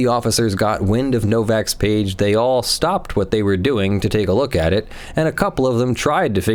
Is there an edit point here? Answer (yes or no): no